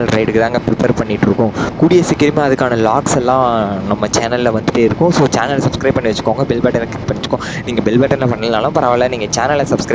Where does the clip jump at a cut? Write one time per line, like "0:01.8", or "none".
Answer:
none